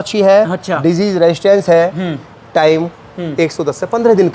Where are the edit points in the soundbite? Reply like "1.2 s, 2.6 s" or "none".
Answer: none